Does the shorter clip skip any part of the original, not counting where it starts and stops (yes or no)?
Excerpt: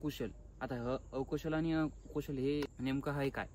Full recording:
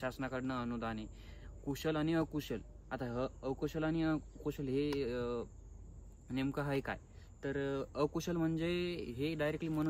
yes